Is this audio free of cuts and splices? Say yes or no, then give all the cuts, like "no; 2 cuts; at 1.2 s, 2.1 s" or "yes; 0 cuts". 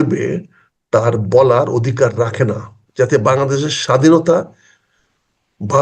no; 1 cut; at 2.8 s